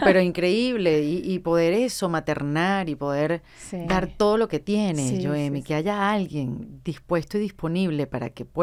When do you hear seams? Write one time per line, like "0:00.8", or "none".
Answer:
none